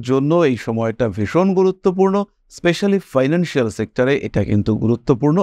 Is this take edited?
no; 0 cuts

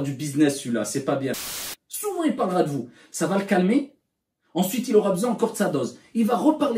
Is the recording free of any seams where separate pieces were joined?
no; 1 cut; at 1.5 s

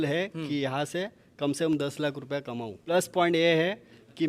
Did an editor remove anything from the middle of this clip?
yes; 1 cut; at 2.8 s

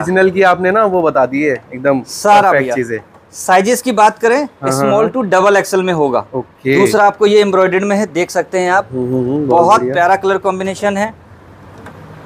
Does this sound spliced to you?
no; 0 cuts

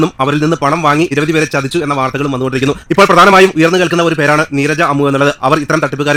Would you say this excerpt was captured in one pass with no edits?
yes; 0 cuts

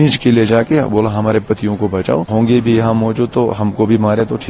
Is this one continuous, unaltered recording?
no; 1 cut; at 2.3 s

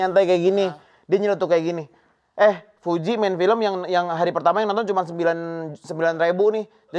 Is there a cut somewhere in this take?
no; 0 cuts

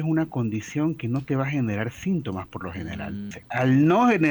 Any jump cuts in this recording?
yes; 1 cut; at 3.4 s

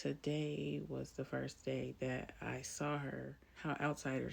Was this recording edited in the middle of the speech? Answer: yes; 1 cut; at 3.4 s

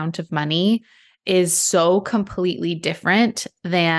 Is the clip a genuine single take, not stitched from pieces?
yes; 0 cuts

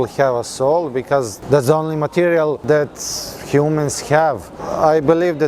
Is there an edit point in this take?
yes; 3 cuts; at 1.3 s, 2.6 s, 4.6 s

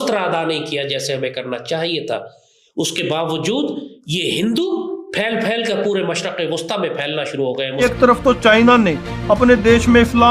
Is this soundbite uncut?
no; 1 cut; at 7.8 s

